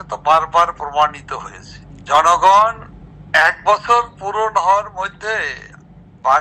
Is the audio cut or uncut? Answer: uncut